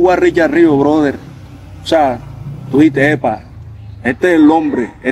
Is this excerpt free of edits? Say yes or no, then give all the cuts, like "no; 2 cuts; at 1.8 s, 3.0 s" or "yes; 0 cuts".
yes; 0 cuts